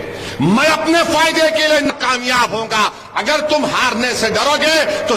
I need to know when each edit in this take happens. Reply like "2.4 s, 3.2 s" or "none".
1.9 s